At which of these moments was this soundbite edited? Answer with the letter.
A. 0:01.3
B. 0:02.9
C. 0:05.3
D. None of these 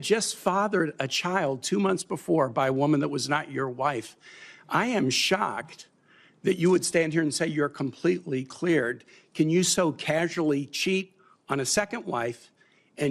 D